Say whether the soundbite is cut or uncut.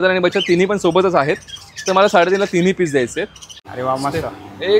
cut